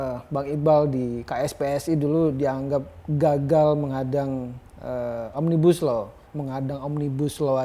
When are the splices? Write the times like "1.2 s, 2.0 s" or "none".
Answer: 6.2 s